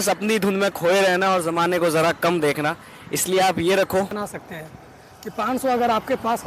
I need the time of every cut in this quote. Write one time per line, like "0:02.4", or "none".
0:04.2